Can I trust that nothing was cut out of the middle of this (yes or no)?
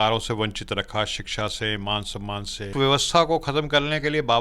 no